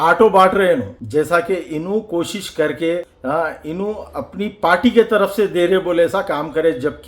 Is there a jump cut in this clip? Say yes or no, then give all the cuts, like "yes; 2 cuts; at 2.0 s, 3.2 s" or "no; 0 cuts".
yes; 2 cuts; at 1.0 s, 3.1 s